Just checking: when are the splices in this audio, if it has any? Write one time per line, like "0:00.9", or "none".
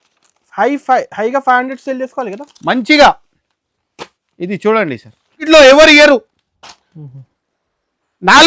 0:05.4